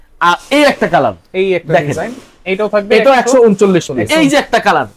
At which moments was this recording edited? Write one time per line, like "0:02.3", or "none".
0:04.0